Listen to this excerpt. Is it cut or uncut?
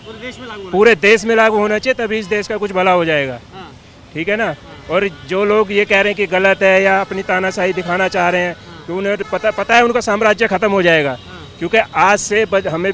uncut